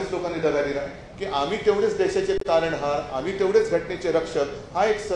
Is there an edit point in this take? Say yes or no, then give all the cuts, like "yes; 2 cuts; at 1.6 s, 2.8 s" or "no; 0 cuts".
yes; 1 cut; at 1.0 s